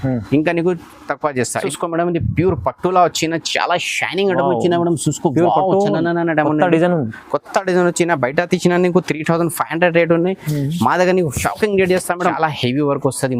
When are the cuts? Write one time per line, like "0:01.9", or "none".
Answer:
0:01.7
0:12.2